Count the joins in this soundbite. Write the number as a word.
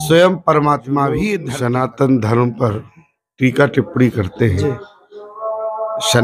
one